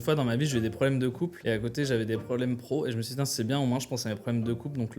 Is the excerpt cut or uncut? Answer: cut